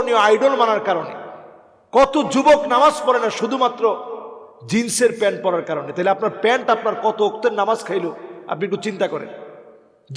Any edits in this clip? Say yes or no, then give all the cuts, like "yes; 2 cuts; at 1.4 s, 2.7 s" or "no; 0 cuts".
no; 0 cuts